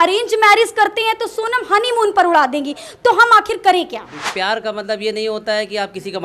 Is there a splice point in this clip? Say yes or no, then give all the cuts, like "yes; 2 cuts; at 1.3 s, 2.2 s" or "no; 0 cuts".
yes; 1 cut; at 4.3 s